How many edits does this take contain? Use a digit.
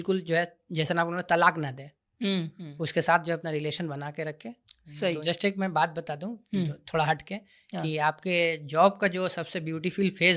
1